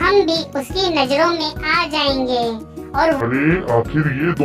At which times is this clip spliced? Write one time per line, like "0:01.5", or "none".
0:03.2

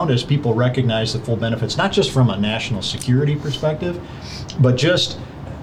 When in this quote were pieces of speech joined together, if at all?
none

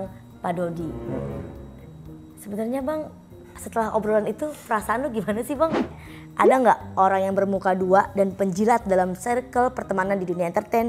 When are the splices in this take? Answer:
0:05.9

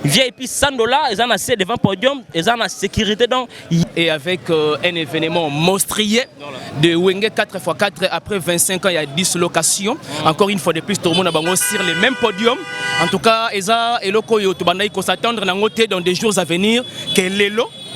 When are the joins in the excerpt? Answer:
0:03.8

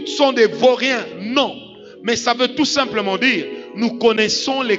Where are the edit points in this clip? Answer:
none

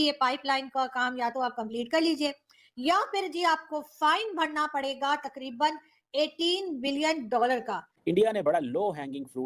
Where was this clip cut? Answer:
0:07.8

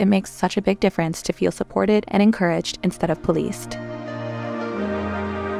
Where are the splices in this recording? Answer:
0:03.7

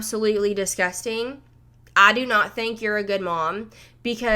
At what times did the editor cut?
none

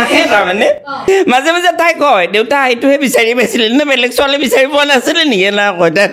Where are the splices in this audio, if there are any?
0:01.1

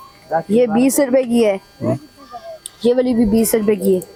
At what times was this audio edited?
none

